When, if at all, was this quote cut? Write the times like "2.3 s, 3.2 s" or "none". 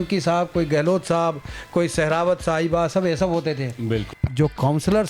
4.2 s